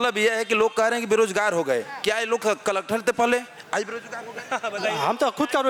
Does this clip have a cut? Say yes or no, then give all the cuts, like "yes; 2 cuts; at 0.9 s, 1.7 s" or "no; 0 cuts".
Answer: no; 0 cuts